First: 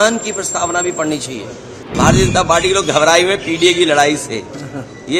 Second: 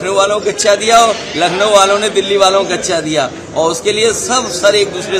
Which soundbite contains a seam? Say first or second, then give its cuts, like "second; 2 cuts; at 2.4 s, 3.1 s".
first; 1 cut; at 1.8 s